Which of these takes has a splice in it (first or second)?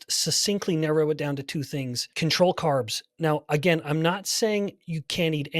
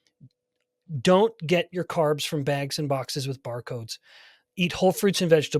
first